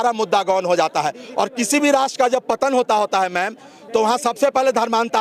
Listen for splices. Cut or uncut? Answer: uncut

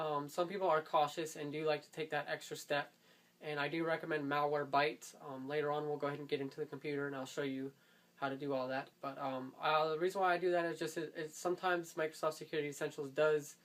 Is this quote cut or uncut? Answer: cut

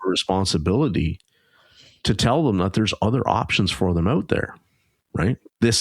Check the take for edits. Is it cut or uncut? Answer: uncut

